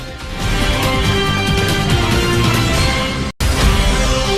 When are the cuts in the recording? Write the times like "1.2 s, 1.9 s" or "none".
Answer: 3.4 s